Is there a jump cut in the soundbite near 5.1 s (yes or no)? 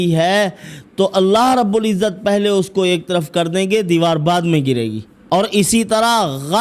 yes